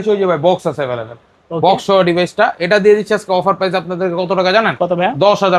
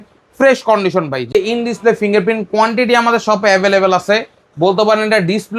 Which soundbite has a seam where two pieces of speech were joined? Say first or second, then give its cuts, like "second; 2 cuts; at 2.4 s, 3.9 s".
second; 1 cut; at 1.3 s